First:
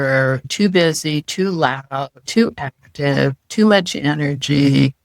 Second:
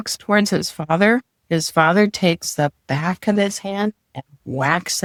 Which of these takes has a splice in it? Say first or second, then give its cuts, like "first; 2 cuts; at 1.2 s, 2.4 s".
first; 1 cut; at 2.2 s